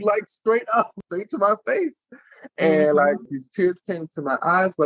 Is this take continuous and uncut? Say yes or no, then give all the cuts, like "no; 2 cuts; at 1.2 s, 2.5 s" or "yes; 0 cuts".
no; 2 cuts; at 0.9 s, 3.2 s